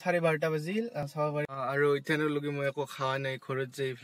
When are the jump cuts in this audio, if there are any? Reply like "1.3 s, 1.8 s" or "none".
1.0 s